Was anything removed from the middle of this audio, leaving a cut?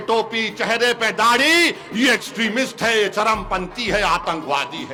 no; 0 cuts

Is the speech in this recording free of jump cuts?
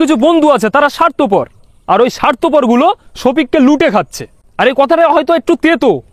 yes; 0 cuts

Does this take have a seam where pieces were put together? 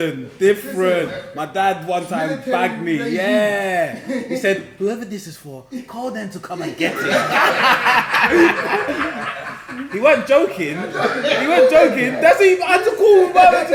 no; 0 cuts

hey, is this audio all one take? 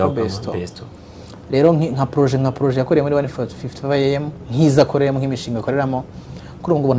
yes; 0 cuts

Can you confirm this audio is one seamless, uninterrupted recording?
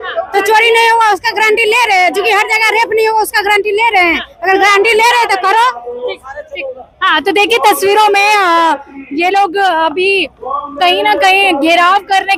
yes; 0 cuts

